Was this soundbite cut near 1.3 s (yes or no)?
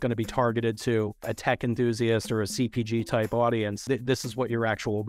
yes